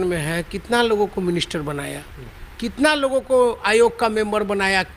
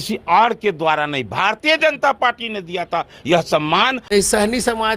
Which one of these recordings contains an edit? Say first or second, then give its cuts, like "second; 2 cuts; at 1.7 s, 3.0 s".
second; 1 cut; at 4.0 s